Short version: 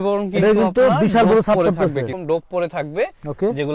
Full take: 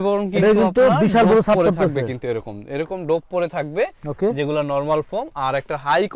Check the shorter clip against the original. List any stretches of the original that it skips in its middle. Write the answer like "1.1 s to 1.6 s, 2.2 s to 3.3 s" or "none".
2.1 s to 2.9 s